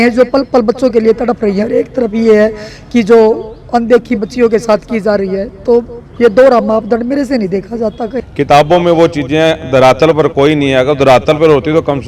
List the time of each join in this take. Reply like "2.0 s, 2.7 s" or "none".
8.2 s